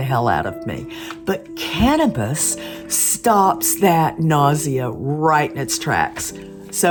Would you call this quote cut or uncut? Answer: uncut